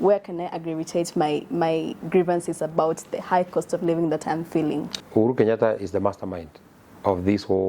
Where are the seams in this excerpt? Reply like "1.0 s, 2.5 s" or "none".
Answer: 5.0 s